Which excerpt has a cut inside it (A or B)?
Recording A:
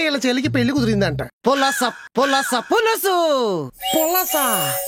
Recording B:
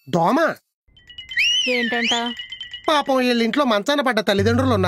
A